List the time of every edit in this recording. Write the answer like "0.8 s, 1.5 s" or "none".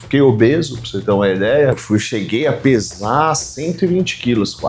1.7 s